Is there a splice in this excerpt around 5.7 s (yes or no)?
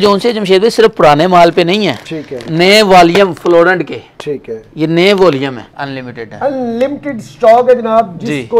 yes